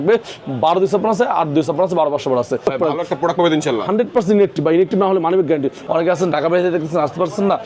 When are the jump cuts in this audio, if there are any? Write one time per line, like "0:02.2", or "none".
0:02.6
0:05.8